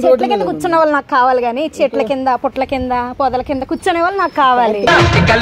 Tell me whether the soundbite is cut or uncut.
uncut